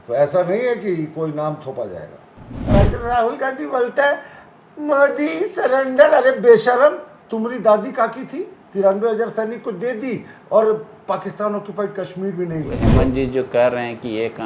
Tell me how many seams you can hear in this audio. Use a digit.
2